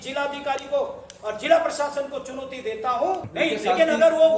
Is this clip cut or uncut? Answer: cut